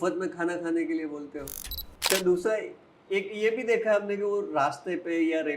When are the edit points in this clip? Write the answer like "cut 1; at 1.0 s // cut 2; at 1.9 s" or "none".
cut 1; at 2.1 s